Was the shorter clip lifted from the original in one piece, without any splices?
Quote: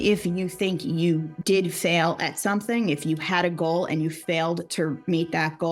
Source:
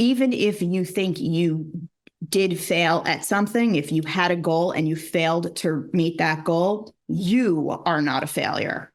no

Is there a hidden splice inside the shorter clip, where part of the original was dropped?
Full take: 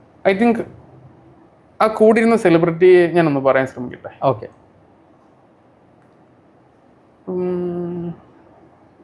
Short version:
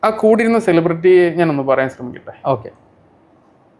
no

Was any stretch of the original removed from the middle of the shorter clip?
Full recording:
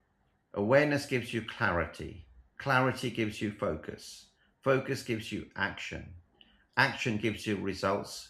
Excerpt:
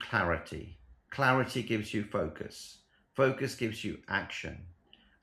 no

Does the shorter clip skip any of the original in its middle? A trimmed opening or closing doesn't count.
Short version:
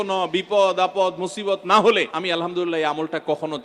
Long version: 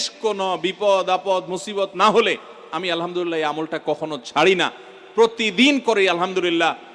yes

